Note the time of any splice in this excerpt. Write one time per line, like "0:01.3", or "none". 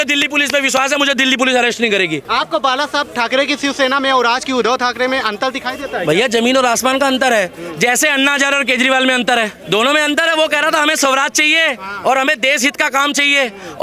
0:02.2
0:09.6